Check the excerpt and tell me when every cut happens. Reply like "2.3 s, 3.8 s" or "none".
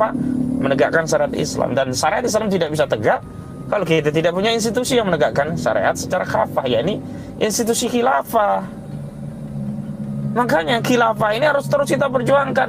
none